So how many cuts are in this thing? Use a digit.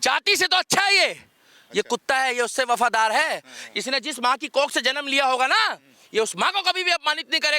0